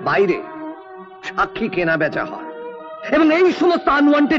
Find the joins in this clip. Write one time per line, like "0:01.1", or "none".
none